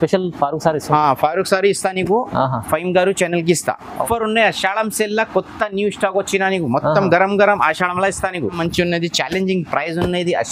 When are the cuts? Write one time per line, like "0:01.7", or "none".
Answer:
0:04.0
0:08.6